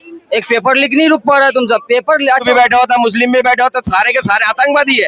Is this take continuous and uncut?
no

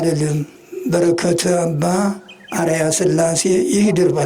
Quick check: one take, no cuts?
yes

